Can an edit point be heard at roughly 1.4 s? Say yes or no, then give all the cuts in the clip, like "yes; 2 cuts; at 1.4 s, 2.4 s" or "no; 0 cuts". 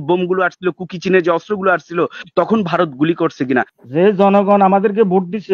no; 1 cut; at 3.8 s